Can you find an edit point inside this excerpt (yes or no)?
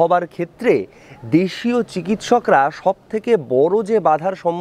no